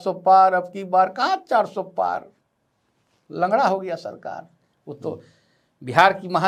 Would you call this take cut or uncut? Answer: uncut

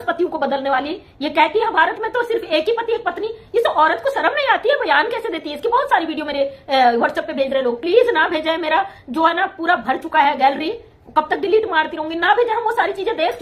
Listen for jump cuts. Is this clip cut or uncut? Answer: uncut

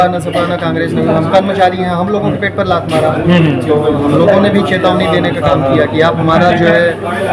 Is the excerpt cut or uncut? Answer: uncut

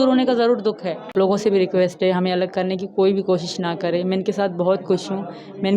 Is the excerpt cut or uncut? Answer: cut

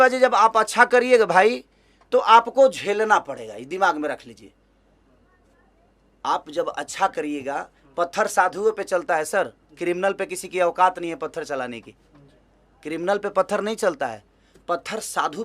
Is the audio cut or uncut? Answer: uncut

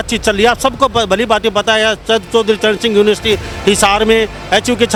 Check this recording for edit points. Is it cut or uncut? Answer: uncut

